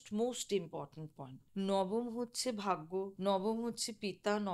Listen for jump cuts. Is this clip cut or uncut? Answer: cut